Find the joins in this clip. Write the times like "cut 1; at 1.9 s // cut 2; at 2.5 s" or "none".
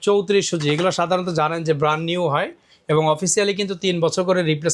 none